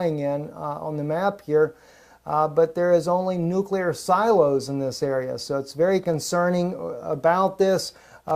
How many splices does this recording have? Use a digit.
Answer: 1